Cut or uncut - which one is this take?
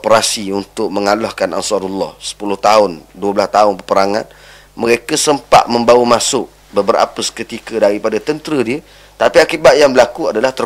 uncut